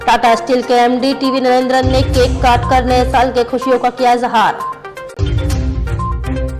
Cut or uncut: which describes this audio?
uncut